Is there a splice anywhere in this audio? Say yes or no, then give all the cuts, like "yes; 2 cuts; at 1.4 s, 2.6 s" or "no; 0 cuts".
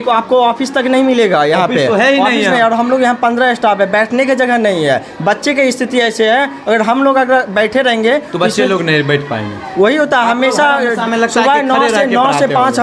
no; 0 cuts